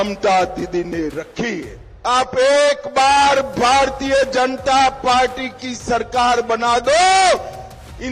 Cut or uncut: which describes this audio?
uncut